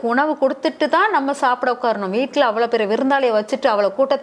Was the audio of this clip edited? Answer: no; 0 cuts

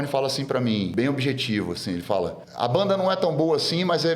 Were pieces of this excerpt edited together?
yes; 2 cuts; at 0.9 s, 2.4 s

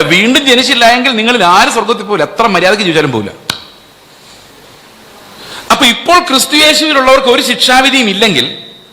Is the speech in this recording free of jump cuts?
no; 1 cut; at 5.2 s

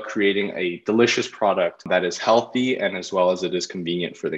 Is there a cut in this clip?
yes; 1 cut; at 1.8 s

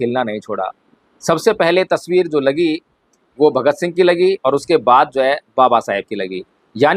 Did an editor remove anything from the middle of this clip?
no; 0 cuts

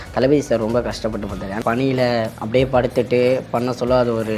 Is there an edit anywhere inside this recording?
yes; 2 cuts; at 1.6 s, 2.4 s

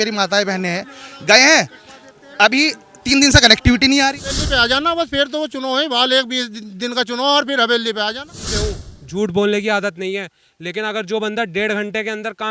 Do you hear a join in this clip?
yes; 2 cuts; at 4.4 s, 8.5 s

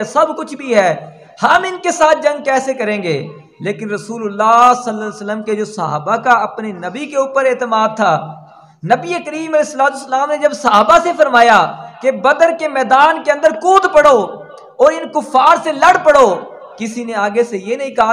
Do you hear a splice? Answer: no; 0 cuts

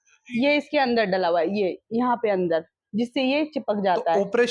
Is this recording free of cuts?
yes; 0 cuts

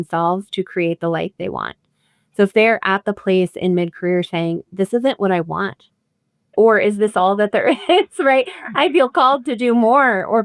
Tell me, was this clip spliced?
yes; 1 cut; at 6.5 s

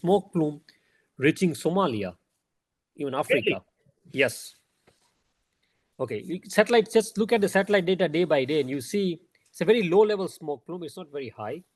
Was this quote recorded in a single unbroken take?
yes; 0 cuts

